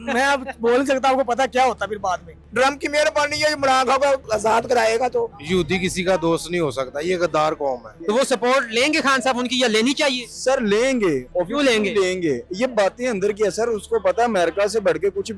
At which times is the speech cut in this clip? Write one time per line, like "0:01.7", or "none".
0:02.4
0:04.2
0:05.4
0:07.9
0:11.3